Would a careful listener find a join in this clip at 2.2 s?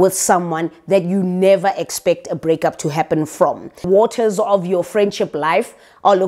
no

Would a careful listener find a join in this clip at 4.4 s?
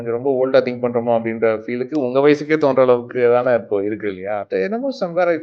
yes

